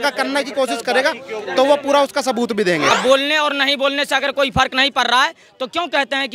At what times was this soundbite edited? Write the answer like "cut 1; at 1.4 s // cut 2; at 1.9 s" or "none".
cut 1; at 2.9 s